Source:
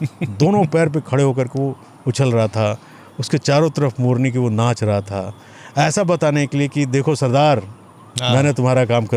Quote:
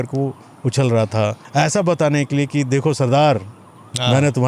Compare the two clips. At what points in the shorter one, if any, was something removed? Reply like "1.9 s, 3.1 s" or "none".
1.4 s

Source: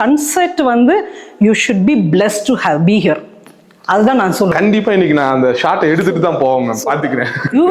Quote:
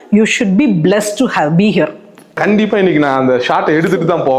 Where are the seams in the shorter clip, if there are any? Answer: 2.4 s

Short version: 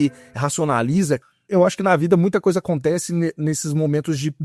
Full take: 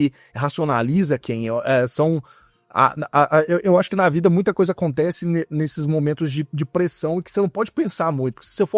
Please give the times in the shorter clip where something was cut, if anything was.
1.5 s

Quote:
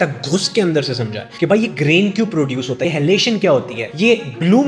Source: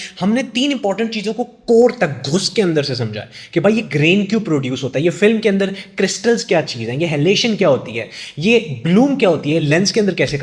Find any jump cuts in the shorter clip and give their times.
1.2 s, 2.8 s, 3.8 s

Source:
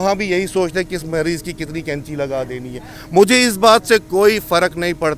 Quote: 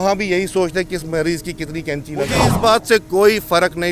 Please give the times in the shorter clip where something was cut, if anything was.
2.5 s

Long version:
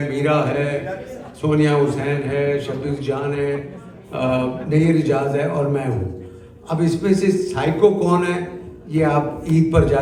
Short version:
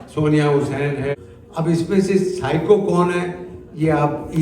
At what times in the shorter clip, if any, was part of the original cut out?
1.1 s

